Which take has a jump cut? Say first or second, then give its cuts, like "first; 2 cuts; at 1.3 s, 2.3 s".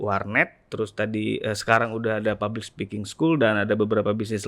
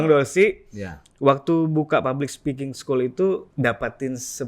second; 1 cut; at 3.5 s